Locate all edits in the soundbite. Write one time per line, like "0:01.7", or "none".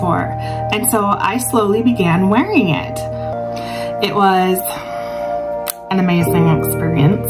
0:03.3